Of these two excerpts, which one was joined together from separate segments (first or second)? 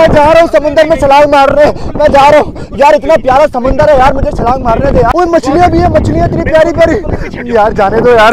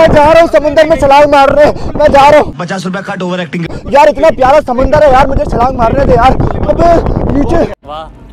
first